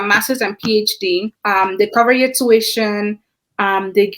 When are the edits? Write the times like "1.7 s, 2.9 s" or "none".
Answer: 1.3 s